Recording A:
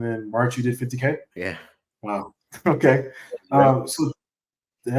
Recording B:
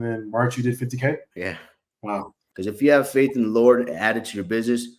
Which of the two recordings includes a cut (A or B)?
B